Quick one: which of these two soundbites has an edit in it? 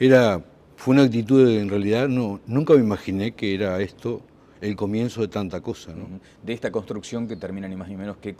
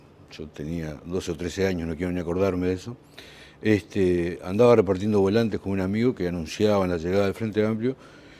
second; 1 cut; at 3.8 s

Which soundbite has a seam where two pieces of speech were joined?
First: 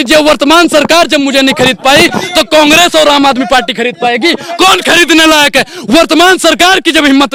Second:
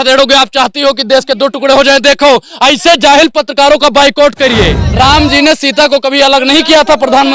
second; 1 cut; at 4.8 s

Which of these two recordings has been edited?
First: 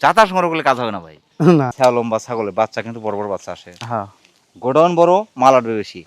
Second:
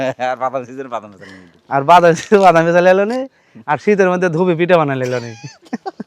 first; 1 cut; at 1.7 s

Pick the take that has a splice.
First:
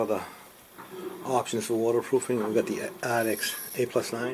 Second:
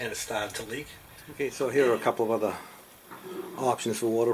second; 1 cut; at 1.4 s

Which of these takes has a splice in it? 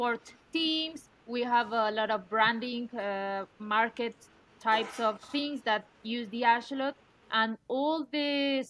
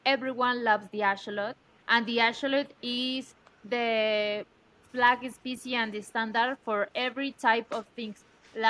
first; 1 cut; at 1.1 s

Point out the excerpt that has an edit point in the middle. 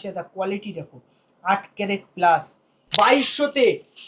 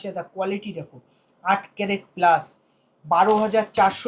first; 1 cut; at 2.8 s

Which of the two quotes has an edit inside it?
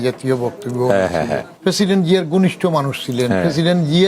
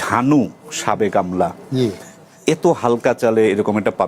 first; 1 cut; at 1.5 s

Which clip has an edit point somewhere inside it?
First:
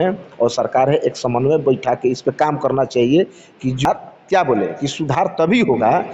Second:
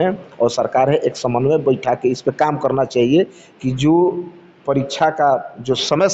first; 1 cut; at 3.8 s

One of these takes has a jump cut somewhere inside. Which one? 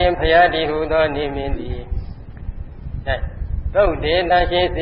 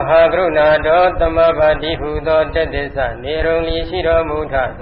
first; 1 cut; at 2.9 s

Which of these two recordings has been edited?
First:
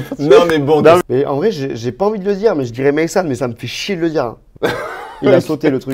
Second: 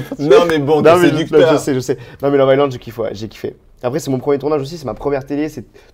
first; 2 cuts; at 1.0 s, 4.4 s

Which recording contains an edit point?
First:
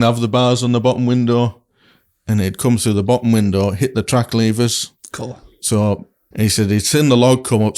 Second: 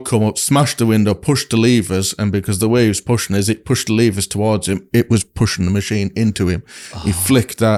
first; 1 cut; at 6.2 s

